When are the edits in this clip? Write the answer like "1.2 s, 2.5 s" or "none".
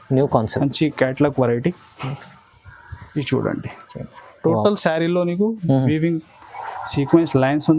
none